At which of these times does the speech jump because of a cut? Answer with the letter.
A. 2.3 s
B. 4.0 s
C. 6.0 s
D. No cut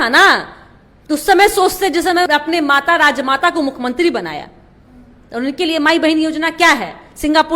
A